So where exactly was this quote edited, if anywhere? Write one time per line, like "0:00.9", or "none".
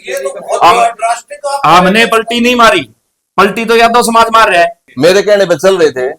0:04.8